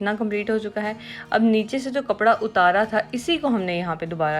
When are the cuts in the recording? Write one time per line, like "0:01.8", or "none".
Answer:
none